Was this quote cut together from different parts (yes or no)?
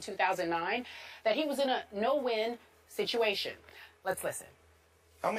yes